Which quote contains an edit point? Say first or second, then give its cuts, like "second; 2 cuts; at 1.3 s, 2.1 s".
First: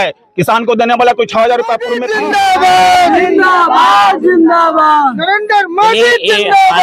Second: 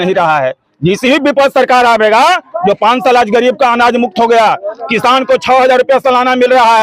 first; 1 cut; at 2.0 s